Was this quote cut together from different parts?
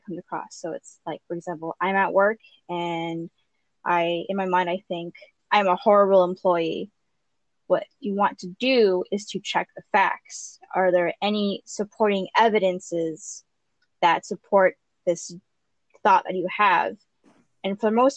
no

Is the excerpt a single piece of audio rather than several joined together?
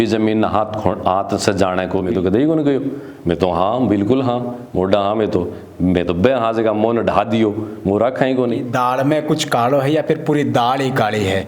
no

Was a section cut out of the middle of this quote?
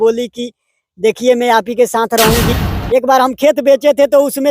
yes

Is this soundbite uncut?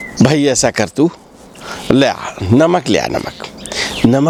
yes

